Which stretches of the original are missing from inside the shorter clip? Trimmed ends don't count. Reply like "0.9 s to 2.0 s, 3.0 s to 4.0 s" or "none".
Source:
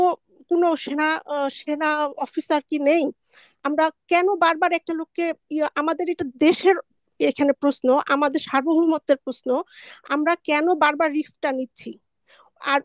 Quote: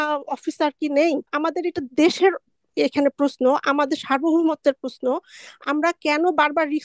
3.2 s to 5.7 s

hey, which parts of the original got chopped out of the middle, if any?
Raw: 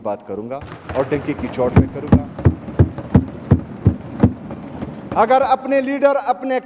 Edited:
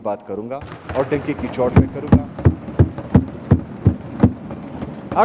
none

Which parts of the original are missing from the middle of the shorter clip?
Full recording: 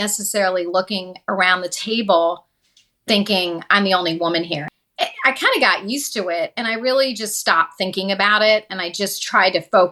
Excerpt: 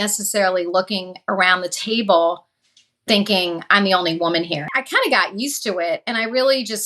4.8 s to 5.3 s

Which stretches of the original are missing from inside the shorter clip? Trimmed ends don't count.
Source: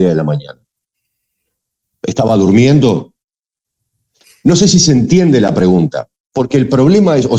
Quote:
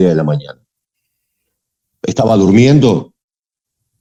none

